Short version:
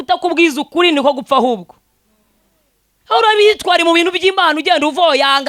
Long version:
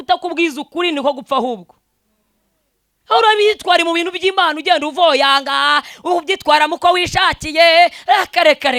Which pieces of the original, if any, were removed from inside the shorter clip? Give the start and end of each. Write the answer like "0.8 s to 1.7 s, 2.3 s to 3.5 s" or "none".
none